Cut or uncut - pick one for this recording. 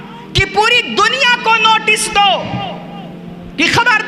uncut